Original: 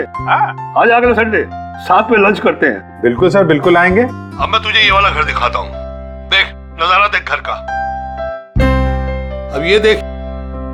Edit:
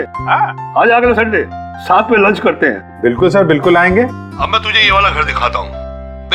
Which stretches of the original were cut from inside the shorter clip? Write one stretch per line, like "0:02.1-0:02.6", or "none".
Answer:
none